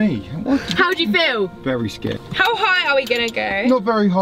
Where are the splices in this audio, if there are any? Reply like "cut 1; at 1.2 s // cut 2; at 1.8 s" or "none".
cut 1; at 2.1 s